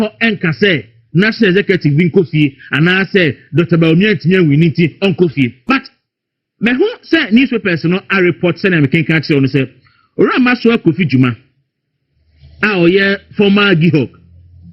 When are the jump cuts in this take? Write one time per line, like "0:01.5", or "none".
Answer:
0:05.3